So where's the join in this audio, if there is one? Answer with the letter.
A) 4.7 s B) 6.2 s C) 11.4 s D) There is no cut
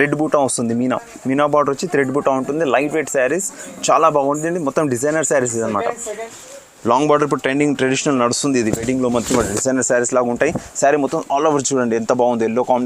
B